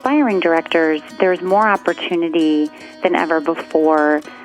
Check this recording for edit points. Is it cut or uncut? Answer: uncut